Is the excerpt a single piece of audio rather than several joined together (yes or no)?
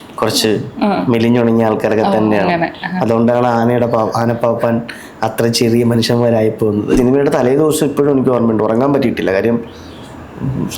no